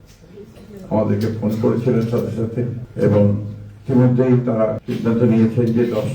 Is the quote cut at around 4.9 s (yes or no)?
yes